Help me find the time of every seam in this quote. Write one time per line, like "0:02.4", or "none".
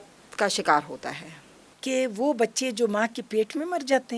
none